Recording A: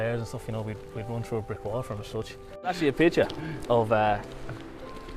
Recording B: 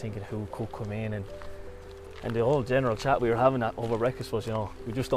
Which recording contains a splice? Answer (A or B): A